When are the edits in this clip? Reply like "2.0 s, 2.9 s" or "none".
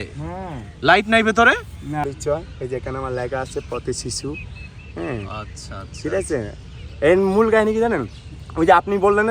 none